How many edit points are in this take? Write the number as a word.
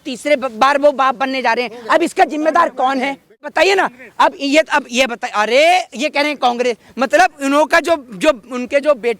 one